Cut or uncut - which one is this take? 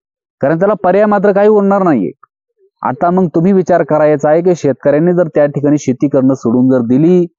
uncut